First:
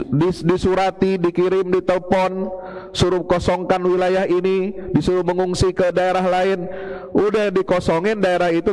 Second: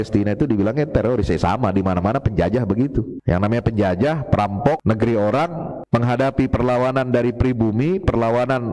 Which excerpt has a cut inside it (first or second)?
second